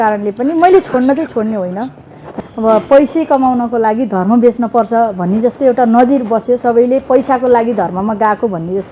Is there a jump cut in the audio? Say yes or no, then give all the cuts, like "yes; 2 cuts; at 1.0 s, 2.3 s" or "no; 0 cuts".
yes; 1 cut; at 2.3 s